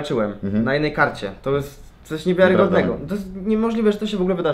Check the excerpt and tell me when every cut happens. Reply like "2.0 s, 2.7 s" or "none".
none